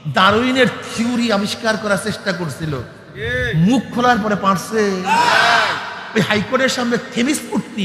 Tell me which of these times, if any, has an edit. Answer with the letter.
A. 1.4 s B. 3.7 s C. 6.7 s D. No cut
D